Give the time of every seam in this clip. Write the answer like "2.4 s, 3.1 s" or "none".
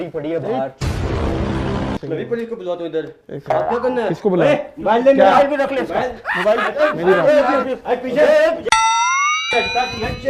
2.0 s